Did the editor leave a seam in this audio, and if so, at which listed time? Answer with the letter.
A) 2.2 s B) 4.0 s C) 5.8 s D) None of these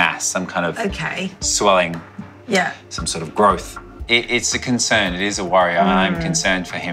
B